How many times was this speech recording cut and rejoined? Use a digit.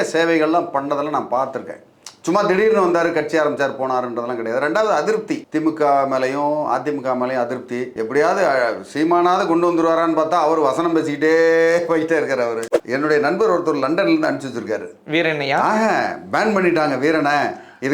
1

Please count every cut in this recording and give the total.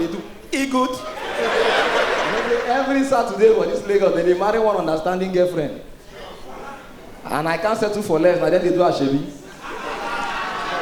1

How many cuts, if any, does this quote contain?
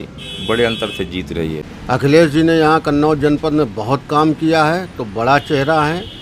1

